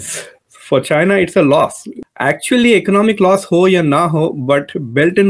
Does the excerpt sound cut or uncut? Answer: uncut